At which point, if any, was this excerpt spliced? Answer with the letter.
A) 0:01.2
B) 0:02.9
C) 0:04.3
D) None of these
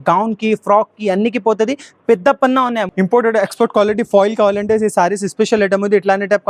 B